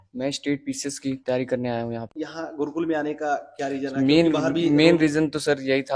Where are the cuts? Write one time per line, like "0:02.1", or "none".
none